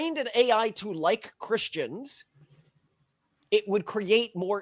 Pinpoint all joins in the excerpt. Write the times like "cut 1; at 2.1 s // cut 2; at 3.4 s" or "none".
none